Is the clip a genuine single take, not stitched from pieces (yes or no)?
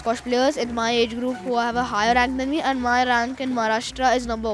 yes